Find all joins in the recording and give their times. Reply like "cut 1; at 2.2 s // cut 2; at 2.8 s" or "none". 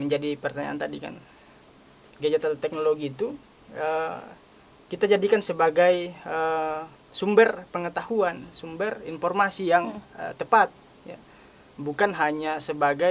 none